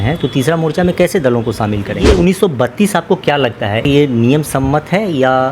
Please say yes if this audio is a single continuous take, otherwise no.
no